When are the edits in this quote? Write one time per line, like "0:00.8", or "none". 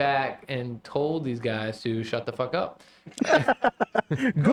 none